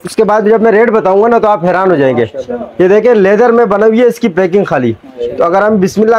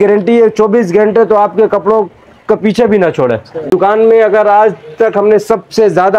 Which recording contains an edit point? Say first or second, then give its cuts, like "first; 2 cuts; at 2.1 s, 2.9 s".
second; 1 cut; at 3.7 s